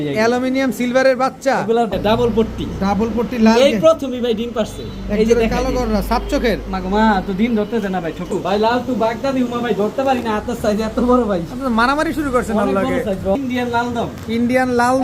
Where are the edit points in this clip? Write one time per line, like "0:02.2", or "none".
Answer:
0:01.9
0:08.3
0:13.4